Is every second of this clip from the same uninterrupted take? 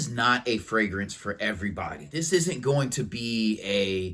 no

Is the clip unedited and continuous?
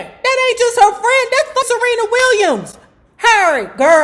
no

